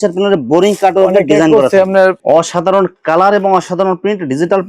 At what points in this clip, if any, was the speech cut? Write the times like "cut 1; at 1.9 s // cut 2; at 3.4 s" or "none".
cut 1; at 2.2 s